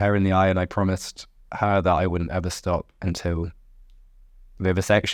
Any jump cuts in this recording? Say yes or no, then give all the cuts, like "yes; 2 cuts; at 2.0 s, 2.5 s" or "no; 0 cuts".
no; 0 cuts